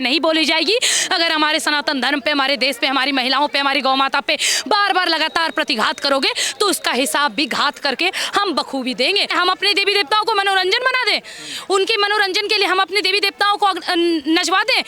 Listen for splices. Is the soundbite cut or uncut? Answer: cut